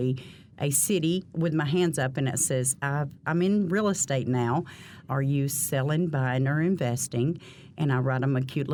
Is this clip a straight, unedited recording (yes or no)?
yes